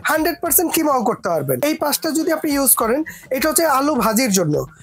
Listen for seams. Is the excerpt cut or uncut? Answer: cut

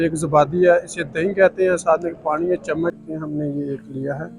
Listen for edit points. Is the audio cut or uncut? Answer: cut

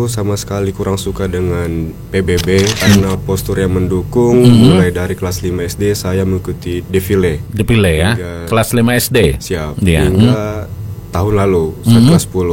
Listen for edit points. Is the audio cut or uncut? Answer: cut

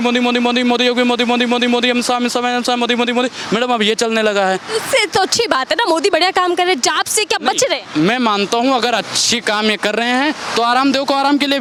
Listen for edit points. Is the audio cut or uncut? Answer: uncut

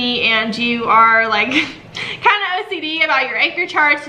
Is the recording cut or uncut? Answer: uncut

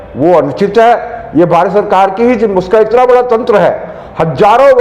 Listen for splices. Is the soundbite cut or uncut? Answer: uncut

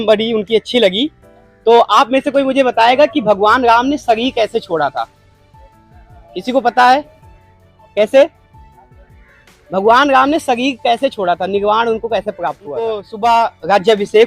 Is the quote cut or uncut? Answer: cut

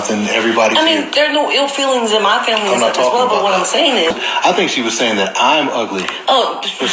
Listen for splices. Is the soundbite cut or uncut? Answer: cut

